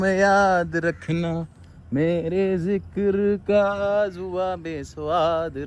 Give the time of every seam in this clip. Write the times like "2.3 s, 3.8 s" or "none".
none